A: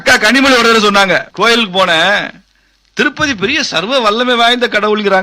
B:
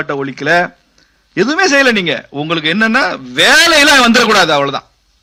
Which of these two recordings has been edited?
A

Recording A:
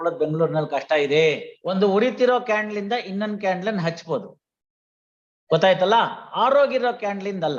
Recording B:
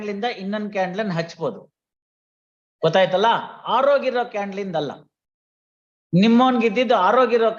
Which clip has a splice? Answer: A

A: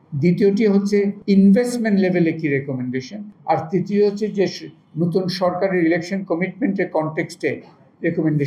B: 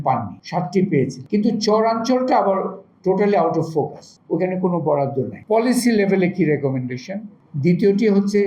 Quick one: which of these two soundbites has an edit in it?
B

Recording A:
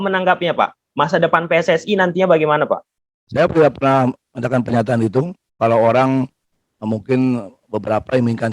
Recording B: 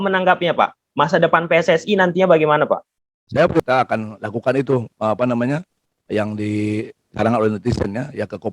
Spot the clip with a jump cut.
B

